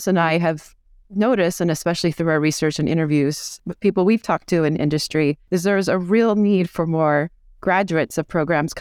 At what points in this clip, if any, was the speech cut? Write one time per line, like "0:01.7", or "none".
0:03.6
0:05.4